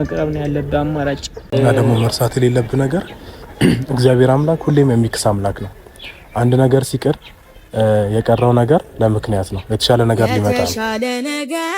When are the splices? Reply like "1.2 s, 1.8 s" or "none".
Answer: 1.3 s, 10.7 s